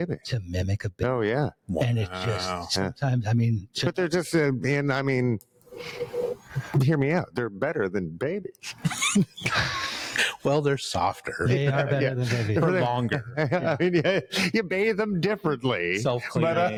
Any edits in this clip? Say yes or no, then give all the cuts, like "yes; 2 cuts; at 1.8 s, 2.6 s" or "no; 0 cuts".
no; 0 cuts